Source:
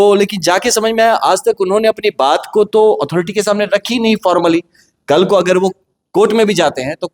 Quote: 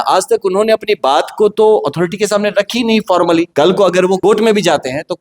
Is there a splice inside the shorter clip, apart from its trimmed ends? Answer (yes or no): yes